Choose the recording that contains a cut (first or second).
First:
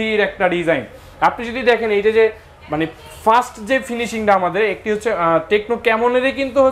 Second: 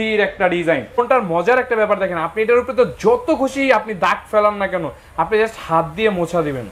second